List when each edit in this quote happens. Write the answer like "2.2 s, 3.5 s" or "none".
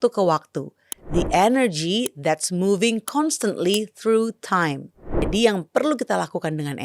5.3 s